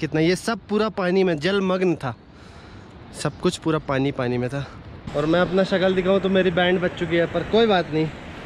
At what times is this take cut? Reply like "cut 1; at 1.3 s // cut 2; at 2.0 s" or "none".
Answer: cut 1; at 5.0 s